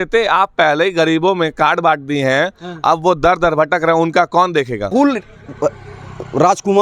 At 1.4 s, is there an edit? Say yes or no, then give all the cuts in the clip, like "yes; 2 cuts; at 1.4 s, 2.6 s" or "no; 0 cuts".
no; 1 cut; at 4.9 s